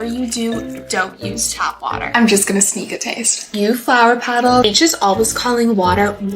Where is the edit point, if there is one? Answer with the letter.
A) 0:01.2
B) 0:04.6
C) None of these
B